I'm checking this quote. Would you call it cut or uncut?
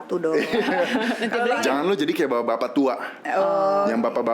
cut